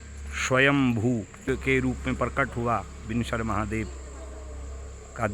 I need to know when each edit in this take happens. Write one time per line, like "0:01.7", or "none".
0:01.5